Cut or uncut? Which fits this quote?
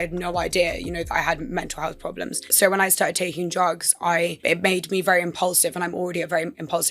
cut